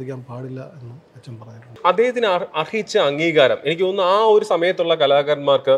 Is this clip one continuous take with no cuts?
no; 1 cut; at 1.7 s

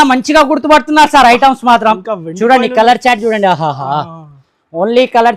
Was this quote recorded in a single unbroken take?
yes; 0 cuts

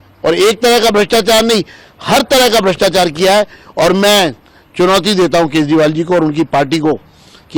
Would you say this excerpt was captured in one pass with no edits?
yes; 0 cuts

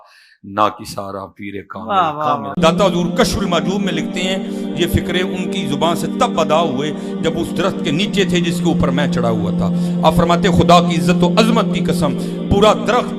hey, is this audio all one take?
no; 1 cut; at 2.5 s

